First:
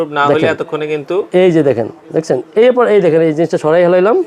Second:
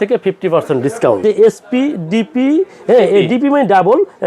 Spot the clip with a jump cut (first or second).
second